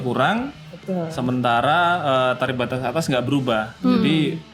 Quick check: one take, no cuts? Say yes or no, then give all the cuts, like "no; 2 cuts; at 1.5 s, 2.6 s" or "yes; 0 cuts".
yes; 0 cuts